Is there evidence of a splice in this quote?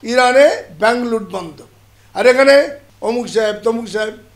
yes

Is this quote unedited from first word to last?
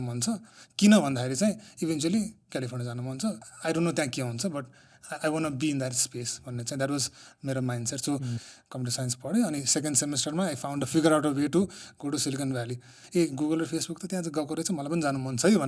no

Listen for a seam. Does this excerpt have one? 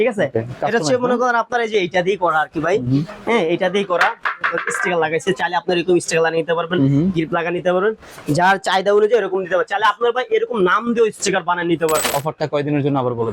yes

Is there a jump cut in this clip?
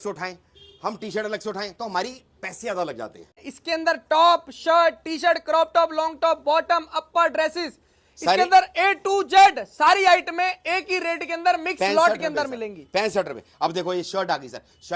yes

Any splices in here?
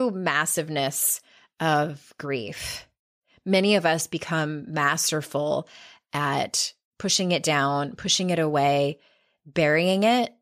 no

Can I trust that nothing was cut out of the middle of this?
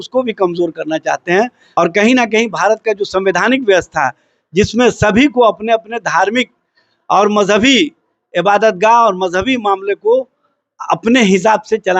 no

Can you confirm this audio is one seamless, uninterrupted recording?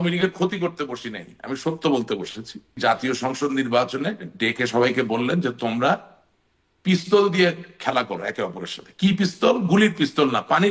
no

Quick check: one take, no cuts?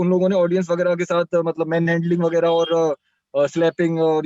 yes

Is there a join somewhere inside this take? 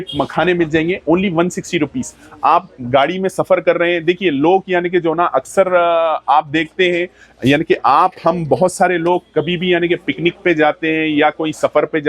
no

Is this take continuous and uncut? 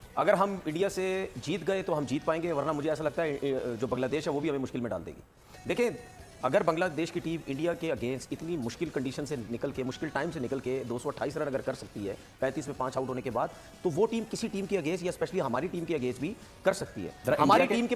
yes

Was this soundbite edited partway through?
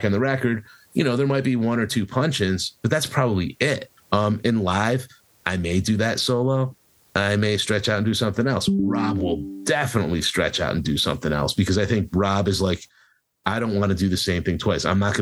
yes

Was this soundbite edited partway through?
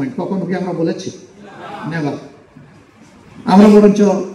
no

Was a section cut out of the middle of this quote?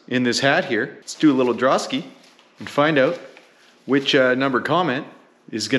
yes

